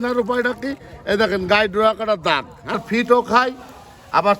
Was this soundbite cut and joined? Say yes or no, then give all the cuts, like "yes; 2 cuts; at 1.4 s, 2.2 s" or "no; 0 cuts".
yes; 1 cut; at 2.8 s